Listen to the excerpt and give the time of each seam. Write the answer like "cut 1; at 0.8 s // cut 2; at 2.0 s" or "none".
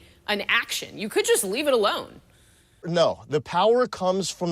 cut 1; at 2.9 s

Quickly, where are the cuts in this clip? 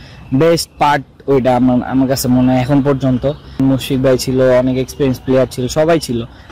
cut 1; at 3.6 s

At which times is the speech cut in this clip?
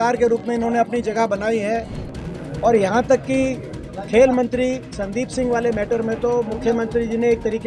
cut 1; at 2.0 s

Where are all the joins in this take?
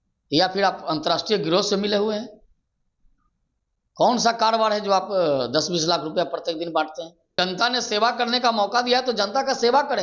cut 1; at 7.4 s

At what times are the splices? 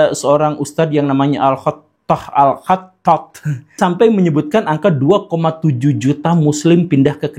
cut 1; at 3.7 s

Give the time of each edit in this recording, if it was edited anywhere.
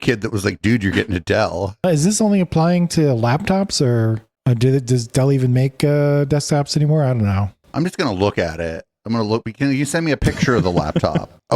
cut 1; at 1.8 s // cut 2; at 7.6 s

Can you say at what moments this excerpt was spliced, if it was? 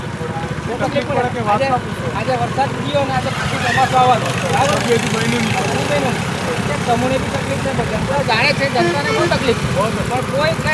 none

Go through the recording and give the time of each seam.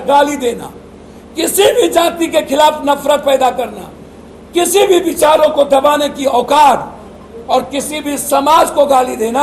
none

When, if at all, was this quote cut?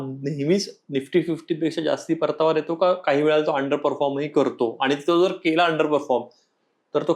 none

